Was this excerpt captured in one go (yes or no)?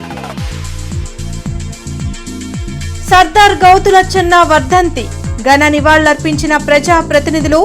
no